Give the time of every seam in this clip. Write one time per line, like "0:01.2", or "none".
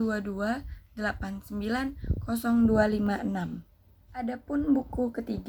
0:04.3